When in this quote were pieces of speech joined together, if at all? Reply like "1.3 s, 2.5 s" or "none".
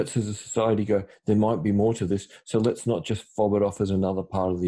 none